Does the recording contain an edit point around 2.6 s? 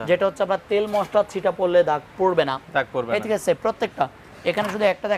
no; 0 cuts

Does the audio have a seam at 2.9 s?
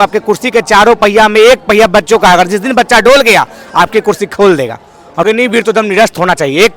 no; 1 cut; at 5.2 s

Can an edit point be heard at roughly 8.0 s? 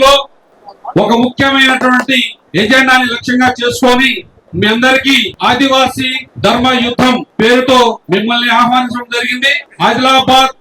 yes; 5 cuts; at 2.4 s, 5.3 s, 6.2 s, 7.3 s, 8.0 s

